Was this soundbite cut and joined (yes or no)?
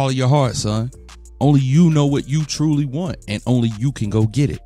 no